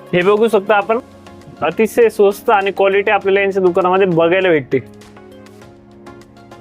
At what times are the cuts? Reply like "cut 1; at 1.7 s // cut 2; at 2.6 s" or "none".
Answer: cut 1; at 4.8 s